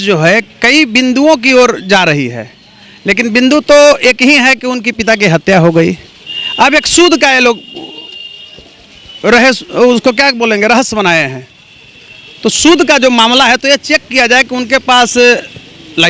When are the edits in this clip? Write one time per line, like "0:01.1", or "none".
none